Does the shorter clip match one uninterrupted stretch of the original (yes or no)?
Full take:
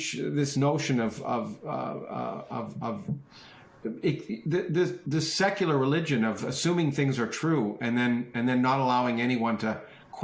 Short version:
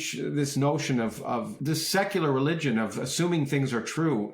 no